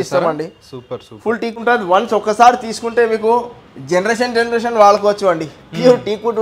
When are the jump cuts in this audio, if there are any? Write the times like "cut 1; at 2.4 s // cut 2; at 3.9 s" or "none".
cut 1; at 1.6 s